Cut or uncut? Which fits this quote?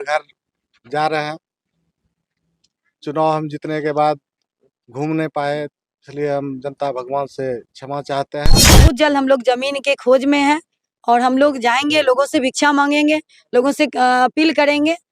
cut